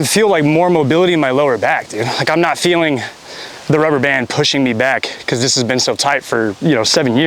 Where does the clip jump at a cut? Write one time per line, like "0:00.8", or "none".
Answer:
none